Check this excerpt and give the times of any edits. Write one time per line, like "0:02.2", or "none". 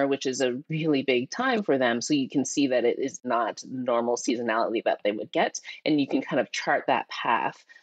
0:03.2